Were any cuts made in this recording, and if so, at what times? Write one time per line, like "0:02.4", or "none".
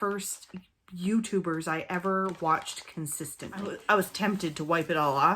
0:03.7